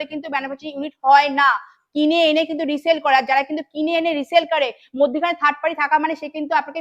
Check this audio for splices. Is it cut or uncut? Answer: uncut